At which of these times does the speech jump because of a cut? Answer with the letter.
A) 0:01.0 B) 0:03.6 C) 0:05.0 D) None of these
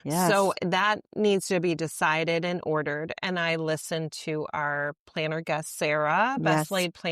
D